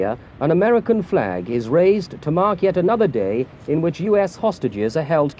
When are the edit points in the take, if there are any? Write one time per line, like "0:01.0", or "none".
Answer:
none